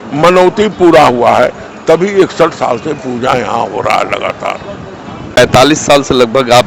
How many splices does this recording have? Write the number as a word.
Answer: zero